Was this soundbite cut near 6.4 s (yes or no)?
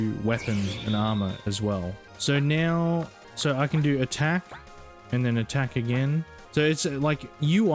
yes